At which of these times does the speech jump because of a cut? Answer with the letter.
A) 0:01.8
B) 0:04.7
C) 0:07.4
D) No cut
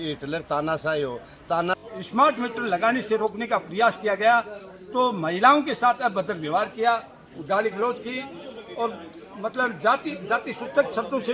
A